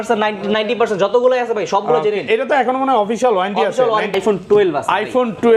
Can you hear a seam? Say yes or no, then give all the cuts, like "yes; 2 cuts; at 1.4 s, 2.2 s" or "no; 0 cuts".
yes; 1 cut; at 4.1 s